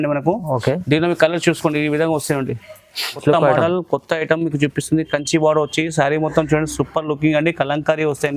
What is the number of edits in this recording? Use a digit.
1